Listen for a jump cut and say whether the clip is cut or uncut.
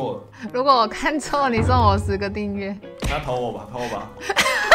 uncut